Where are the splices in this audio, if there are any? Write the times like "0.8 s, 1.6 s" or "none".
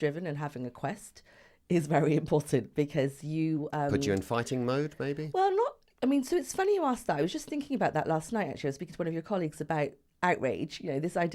none